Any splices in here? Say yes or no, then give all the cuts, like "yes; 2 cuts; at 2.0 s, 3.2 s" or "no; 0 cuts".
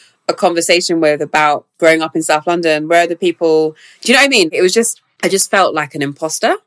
yes; 2 cuts; at 1.7 s, 5.0 s